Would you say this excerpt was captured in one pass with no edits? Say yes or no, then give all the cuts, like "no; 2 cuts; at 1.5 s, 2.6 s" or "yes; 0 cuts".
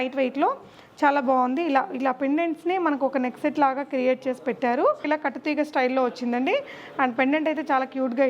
no; 1 cut; at 5.0 s